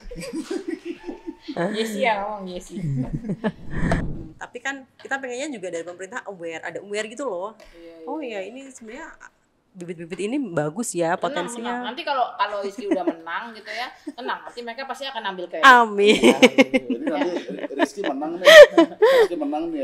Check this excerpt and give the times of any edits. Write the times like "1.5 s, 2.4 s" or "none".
4.0 s